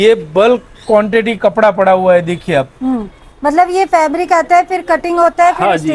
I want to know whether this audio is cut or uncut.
uncut